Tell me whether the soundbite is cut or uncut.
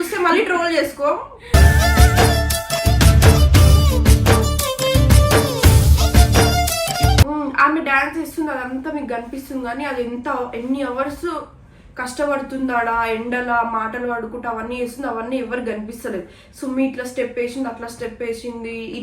cut